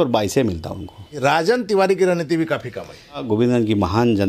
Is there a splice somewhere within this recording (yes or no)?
yes